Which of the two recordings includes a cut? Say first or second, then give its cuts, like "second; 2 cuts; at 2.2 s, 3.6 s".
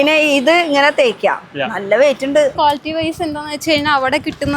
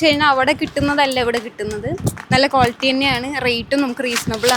first; 1 cut; at 2.5 s